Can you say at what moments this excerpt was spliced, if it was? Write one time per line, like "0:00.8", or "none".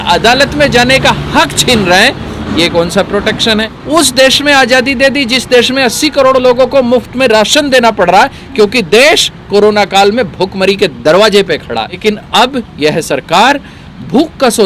0:03.7
0:12.0